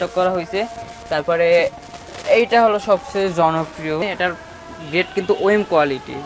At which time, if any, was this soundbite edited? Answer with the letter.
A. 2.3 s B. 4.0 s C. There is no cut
B